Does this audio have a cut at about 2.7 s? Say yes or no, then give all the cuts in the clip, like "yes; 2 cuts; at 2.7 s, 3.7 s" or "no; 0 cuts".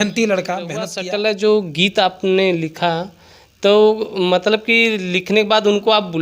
no; 1 cut; at 1.0 s